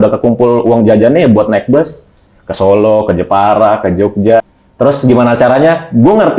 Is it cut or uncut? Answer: cut